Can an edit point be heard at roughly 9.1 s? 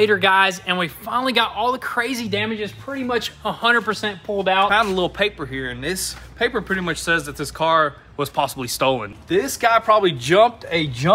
yes; 2 cuts; at 4.7 s, 9.1 s

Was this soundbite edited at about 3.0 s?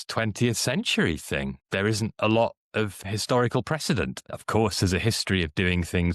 yes; 3 cuts; at 1.6 s, 3.0 s, 4.2 s

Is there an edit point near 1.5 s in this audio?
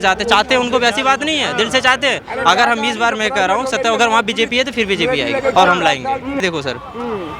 no; 1 cut; at 6.4 s

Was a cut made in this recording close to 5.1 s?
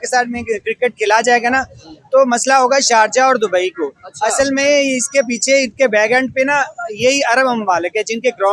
no; 0 cuts

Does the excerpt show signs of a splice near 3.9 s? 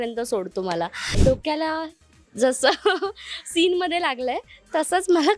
no; 1 cut; at 1.1 s

